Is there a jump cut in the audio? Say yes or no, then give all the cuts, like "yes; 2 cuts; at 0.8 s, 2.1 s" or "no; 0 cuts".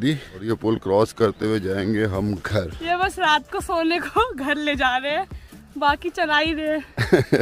yes; 1 cut; at 2.7 s